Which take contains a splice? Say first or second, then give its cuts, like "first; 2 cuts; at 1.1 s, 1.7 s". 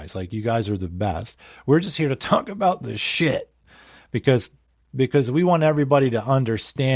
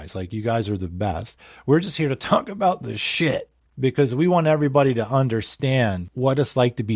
second; 2 cuts; at 3.6 s, 6.1 s